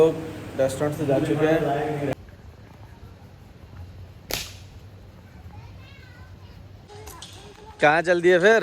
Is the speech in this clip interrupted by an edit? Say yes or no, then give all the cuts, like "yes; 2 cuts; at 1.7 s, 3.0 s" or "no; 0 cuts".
yes; 2 cuts; at 2.1 s, 6.8 s